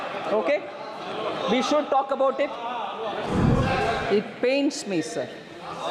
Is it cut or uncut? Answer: cut